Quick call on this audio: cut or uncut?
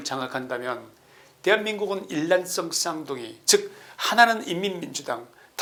uncut